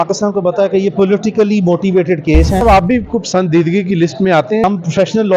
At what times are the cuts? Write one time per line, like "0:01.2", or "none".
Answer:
0:02.6
0:04.6